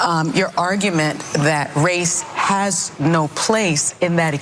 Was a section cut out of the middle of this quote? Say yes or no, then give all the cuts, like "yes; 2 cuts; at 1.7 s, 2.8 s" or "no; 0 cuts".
no; 0 cuts